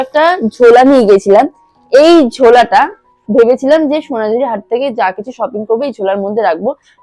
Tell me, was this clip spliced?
no; 0 cuts

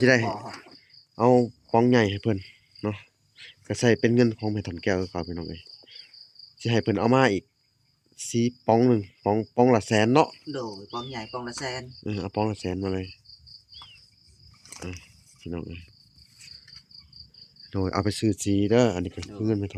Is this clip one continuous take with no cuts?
yes; 0 cuts

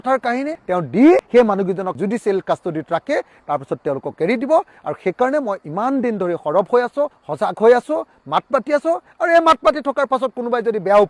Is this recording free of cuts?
no; 1 cut; at 1.9 s

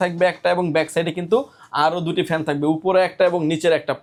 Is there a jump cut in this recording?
no; 0 cuts

